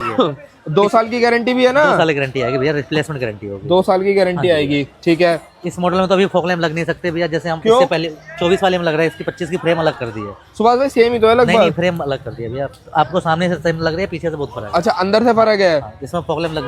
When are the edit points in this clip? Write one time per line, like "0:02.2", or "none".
none